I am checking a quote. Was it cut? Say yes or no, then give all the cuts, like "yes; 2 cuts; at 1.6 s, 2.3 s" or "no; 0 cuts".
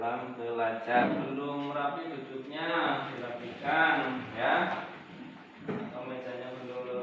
yes; 1 cut; at 1.1 s